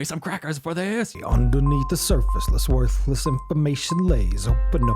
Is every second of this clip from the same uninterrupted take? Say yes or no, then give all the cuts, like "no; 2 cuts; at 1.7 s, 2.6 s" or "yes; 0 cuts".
no; 1 cut; at 1.1 s